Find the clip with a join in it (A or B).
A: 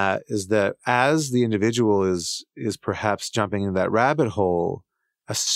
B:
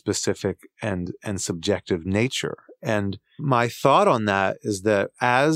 B